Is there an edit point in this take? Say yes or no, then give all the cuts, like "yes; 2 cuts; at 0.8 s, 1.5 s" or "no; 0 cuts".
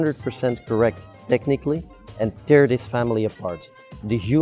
no; 0 cuts